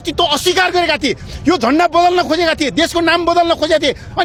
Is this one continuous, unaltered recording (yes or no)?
yes